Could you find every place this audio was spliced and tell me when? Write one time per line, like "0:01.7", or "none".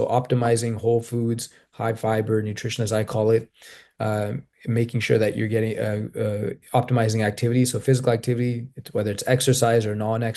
none